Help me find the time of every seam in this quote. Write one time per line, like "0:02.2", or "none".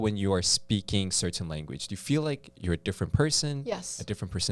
none

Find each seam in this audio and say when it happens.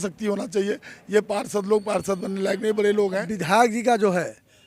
0:03.3

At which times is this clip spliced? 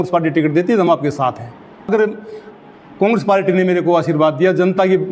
0:01.9

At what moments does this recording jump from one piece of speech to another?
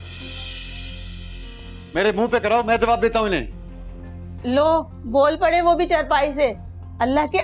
none

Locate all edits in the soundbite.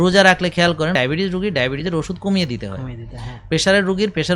0:00.9

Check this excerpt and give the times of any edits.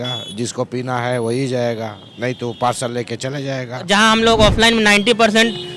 0:03.8

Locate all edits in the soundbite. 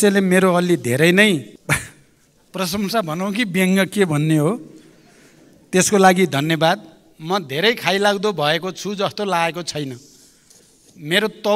0:01.5

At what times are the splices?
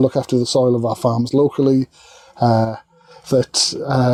none

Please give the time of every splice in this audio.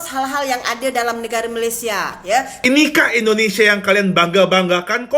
0:02.7

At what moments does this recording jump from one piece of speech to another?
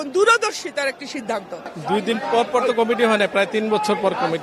none

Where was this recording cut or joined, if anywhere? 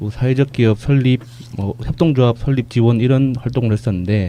none

